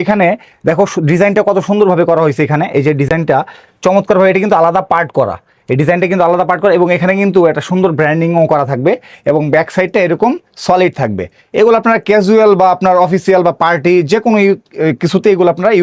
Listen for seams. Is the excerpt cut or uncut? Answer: uncut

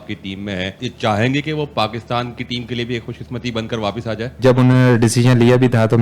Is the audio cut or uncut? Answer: cut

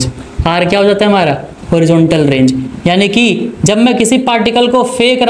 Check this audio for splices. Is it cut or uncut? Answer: uncut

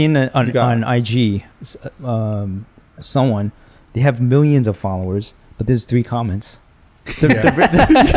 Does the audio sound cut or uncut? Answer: uncut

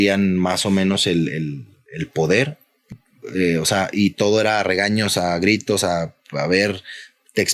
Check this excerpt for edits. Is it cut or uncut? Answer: cut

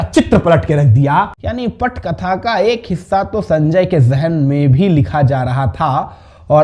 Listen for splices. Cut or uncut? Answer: cut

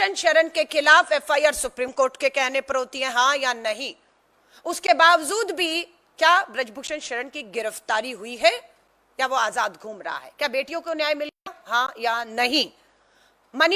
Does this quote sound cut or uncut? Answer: uncut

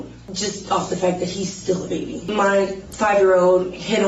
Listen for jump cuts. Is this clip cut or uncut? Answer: cut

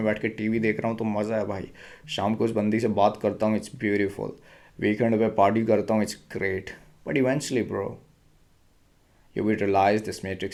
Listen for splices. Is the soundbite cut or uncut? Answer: uncut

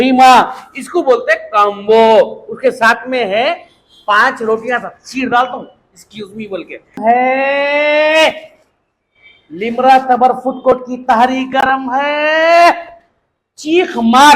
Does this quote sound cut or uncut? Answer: cut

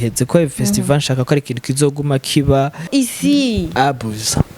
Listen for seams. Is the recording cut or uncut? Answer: cut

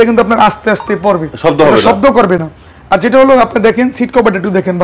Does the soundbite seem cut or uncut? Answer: uncut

